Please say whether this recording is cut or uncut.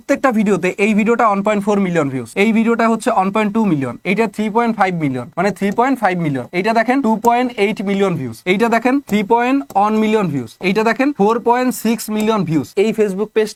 uncut